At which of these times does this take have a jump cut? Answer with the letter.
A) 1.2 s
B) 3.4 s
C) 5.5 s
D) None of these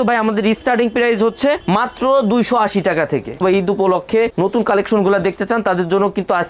B